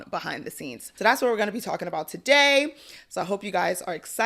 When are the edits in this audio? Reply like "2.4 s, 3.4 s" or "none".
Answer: none